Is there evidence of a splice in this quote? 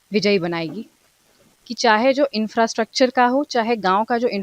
yes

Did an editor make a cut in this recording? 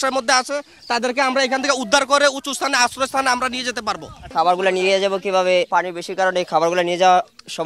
yes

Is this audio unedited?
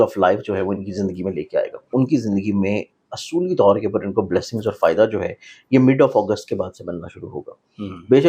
no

